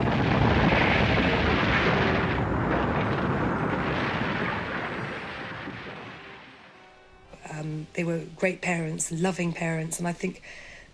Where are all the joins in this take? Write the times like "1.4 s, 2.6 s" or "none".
7.9 s

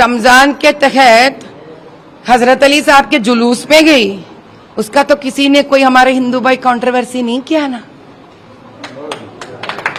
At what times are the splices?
none

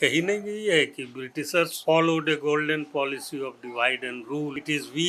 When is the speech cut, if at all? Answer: none

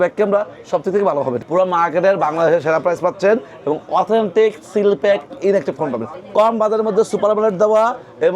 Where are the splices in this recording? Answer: 1.4 s, 6.2 s

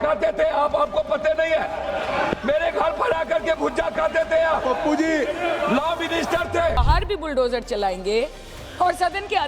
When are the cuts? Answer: 6.8 s

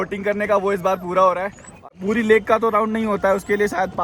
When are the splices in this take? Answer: 1.8 s

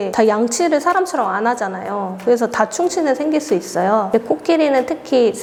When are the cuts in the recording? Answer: none

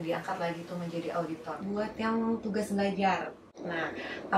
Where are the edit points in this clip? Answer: 1.6 s

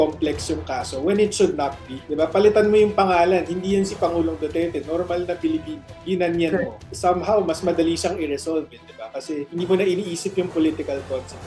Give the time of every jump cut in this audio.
2.0 s, 6.8 s, 9.5 s

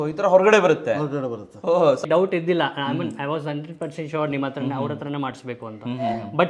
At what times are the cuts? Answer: 2.0 s

